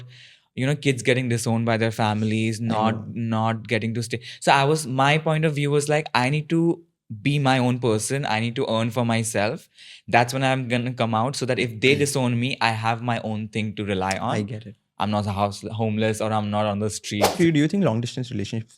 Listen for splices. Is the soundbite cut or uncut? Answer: cut